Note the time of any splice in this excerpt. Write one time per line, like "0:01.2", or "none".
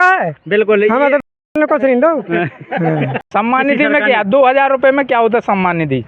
0:03.2